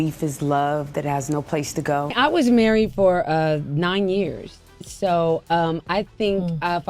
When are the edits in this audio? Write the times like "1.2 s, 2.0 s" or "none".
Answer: 2.1 s